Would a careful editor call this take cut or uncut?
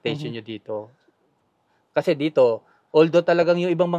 uncut